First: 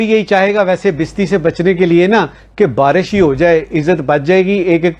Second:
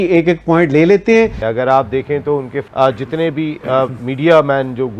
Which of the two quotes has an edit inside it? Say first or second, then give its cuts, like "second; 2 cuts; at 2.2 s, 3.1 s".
second; 2 cuts; at 1.4 s, 2.6 s